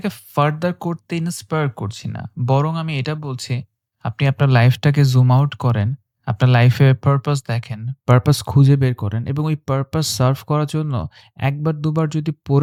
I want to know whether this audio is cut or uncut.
uncut